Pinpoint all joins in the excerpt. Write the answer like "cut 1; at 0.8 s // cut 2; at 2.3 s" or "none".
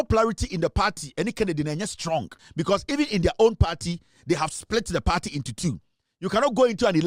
cut 1; at 2.4 s